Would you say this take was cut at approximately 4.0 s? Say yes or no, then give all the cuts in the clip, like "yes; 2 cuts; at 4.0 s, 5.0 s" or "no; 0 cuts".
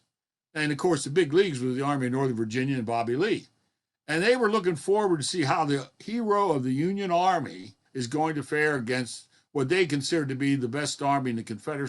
no; 1 cut; at 7.9 s